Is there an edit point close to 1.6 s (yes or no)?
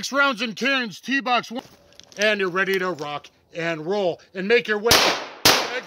yes